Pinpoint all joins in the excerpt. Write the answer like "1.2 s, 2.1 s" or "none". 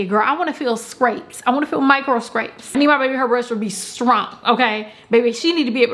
none